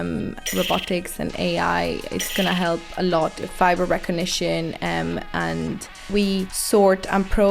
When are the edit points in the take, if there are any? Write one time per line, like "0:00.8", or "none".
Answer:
0:03.4
0:06.1